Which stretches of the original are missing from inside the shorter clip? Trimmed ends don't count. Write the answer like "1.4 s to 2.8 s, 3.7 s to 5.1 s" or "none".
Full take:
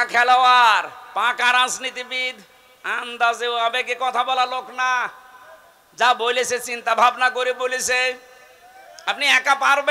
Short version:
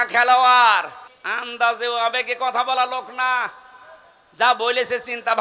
1.0 s to 2.6 s